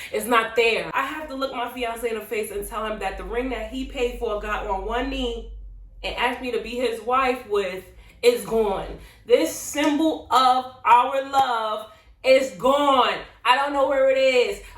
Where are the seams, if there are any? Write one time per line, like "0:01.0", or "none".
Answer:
0:00.9